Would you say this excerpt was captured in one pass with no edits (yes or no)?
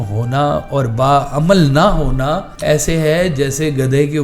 no